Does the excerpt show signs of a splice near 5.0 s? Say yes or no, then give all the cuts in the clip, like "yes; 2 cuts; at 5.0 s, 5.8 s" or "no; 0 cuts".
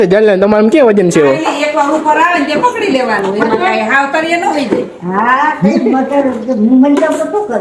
no; 0 cuts